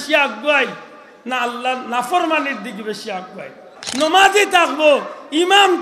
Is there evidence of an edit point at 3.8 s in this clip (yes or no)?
yes